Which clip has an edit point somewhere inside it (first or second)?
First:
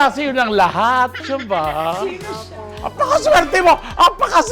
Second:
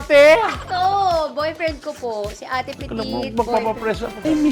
first